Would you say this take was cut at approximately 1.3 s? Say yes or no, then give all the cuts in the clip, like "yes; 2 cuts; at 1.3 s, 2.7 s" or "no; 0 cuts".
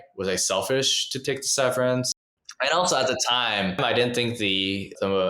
no; 2 cuts; at 2.5 s, 3.8 s